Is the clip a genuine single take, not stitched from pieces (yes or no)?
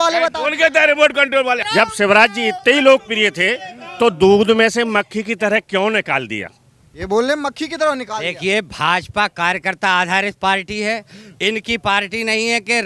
no